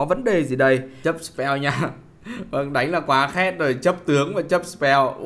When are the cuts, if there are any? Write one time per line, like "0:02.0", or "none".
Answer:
0:00.9